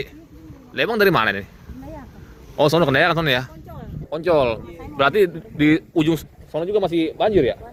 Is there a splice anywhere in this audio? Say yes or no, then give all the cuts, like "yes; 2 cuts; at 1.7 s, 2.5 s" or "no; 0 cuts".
no; 0 cuts